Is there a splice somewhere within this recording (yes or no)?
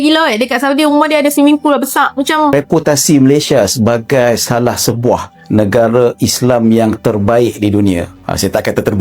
yes